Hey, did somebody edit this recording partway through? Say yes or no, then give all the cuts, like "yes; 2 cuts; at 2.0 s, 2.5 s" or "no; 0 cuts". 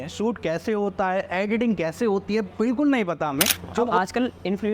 yes; 1 cut; at 3.3 s